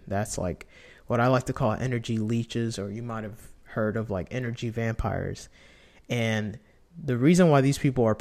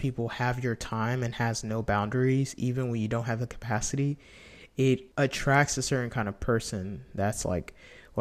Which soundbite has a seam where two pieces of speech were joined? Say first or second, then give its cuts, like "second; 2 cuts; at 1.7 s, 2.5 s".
second; 1 cut; at 5.1 s